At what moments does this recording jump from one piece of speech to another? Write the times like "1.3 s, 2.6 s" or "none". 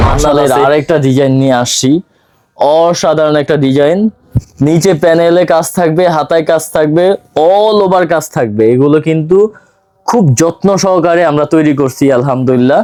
none